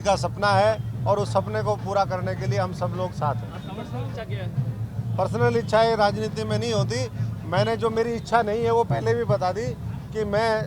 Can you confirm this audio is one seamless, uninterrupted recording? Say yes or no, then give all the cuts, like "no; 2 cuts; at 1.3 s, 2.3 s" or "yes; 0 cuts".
yes; 0 cuts